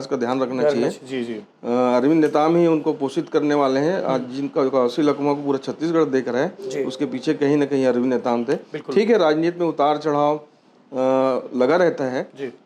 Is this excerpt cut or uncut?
uncut